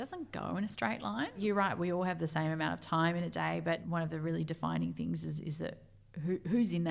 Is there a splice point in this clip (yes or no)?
yes